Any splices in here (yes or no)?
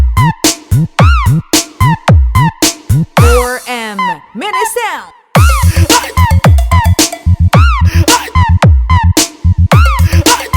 yes